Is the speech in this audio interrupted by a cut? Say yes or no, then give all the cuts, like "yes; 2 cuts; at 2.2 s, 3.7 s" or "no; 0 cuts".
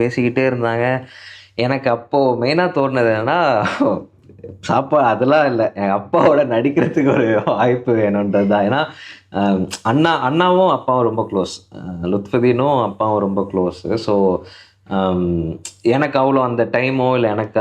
no; 0 cuts